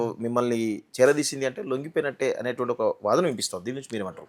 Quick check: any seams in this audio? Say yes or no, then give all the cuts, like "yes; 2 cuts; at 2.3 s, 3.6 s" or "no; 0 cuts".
no; 0 cuts